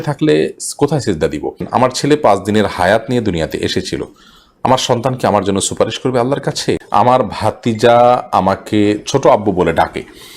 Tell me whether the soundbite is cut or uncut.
cut